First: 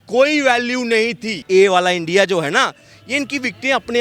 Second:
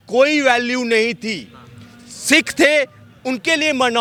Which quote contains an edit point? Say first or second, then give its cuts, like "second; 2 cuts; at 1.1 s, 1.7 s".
first; 1 cut; at 1.4 s